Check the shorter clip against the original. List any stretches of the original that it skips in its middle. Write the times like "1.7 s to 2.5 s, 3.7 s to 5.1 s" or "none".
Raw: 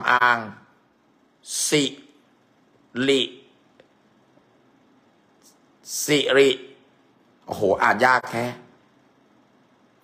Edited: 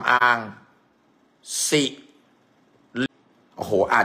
3.1 s to 7.0 s